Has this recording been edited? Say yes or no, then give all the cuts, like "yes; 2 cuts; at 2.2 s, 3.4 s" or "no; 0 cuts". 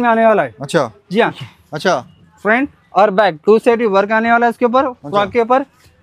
yes; 1 cut; at 1.4 s